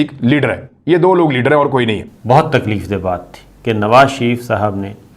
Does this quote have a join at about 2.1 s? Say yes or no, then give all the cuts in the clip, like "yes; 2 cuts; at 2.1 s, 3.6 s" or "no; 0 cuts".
yes; 1 cut; at 2.1 s